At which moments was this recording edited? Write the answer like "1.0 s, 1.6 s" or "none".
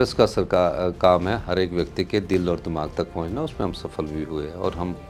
none